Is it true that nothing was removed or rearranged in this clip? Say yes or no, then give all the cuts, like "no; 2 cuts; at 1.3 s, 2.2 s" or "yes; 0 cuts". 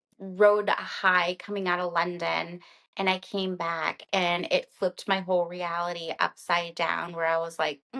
yes; 0 cuts